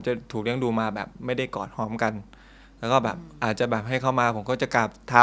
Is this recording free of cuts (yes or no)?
yes